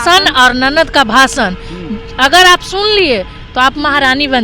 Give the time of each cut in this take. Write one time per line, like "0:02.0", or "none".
none